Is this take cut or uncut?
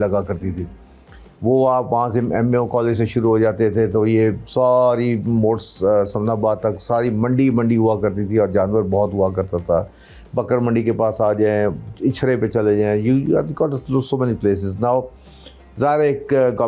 uncut